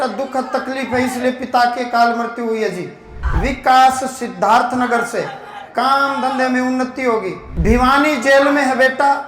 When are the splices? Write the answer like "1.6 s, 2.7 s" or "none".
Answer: 3.2 s, 7.4 s